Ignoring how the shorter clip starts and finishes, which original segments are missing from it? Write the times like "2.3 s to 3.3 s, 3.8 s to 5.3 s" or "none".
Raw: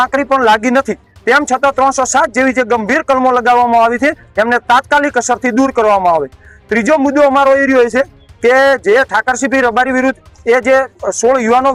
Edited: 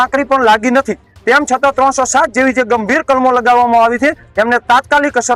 none